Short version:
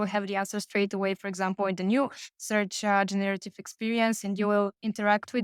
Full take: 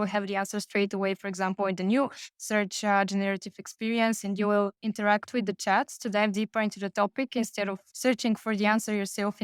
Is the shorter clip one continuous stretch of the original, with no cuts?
yes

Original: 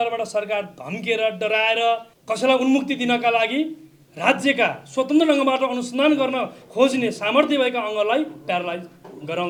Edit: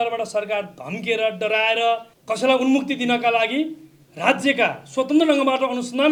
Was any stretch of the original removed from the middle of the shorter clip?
no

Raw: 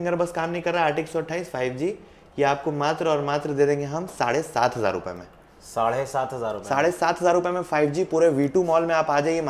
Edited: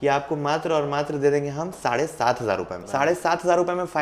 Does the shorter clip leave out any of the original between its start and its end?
yes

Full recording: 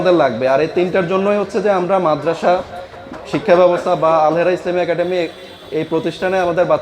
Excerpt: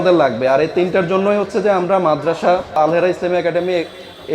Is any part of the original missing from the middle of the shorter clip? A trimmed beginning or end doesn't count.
yes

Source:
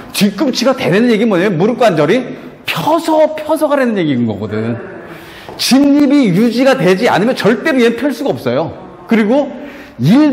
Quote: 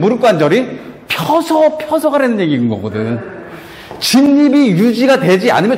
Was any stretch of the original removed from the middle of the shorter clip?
no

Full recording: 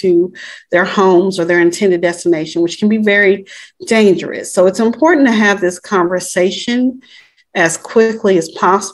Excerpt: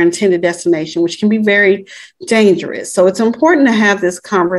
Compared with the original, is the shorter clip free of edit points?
yes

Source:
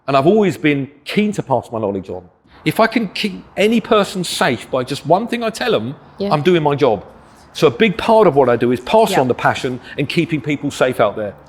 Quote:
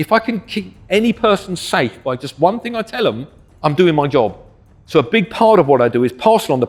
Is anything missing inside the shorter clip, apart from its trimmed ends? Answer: no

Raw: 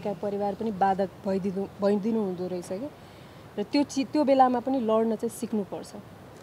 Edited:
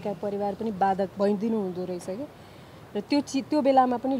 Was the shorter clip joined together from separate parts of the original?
yes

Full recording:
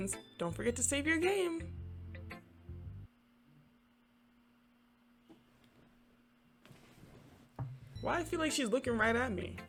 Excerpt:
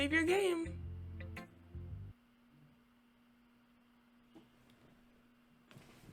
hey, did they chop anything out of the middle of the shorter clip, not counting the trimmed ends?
no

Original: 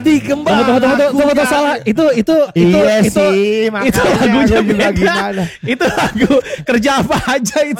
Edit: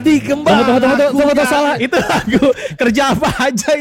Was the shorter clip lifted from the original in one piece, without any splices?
no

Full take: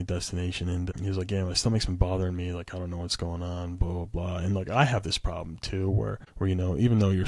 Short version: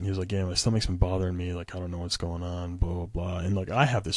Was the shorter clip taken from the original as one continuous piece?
yes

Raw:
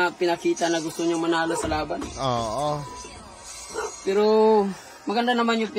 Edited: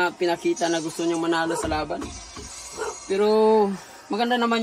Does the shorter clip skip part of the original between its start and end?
yes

